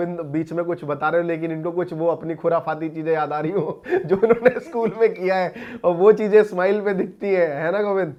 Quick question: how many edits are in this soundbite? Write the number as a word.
zero